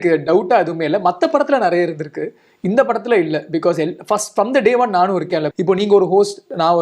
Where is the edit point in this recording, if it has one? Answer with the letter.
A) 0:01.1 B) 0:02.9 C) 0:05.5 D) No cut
C